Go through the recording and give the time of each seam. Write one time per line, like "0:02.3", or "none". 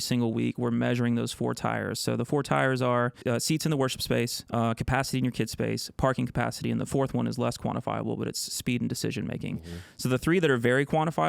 0:03.2
0:04.4

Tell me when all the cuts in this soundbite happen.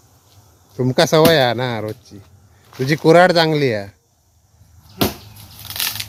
none

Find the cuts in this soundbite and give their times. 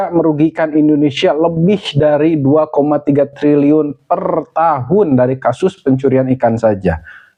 none

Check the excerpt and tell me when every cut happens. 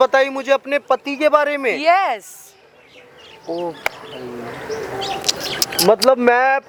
none

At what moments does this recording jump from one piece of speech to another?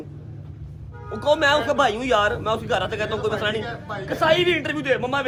none

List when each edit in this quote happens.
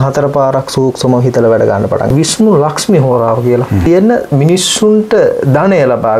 0:02.1
0:03.8

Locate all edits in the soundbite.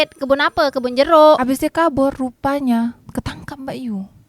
0:01.4

